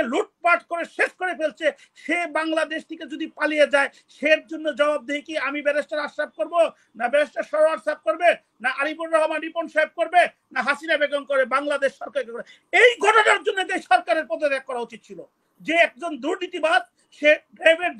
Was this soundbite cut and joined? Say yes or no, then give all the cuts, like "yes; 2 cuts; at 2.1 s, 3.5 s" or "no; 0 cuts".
no; 0 cuts